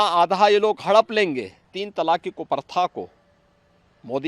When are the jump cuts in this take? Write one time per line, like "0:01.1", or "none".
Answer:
0:01.8